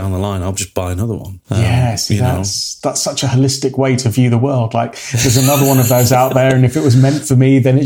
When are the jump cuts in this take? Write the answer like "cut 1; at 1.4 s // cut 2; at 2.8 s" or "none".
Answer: cut 1; at 2.6 s